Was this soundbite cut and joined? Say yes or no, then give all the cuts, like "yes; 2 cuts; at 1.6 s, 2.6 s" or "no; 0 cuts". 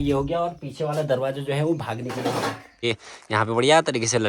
yes; 1 cut; at 2.8 s